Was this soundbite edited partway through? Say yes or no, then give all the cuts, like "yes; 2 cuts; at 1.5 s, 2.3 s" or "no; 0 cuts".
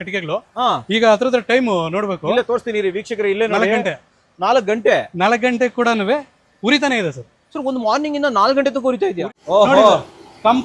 yes; 1 cut; at 9.2 s